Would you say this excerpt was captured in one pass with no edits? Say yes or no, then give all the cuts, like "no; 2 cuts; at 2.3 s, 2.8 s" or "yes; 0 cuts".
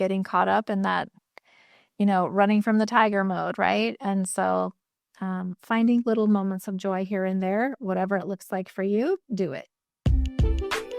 no; 1 cut; at 10.0 s